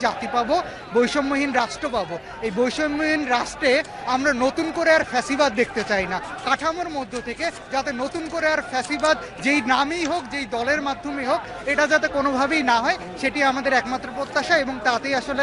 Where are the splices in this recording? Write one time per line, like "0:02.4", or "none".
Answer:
none